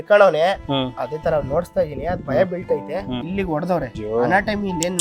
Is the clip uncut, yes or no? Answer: no